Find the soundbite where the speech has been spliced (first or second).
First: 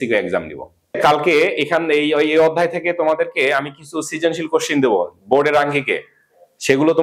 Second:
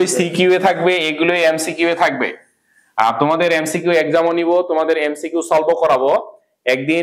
first